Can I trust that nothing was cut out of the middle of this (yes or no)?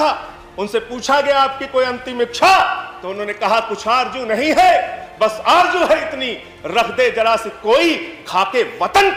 yes